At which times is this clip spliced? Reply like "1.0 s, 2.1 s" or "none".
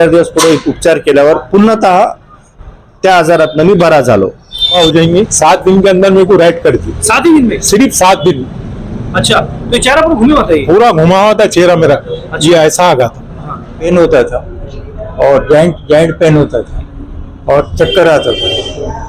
4.7 s, 13.8 s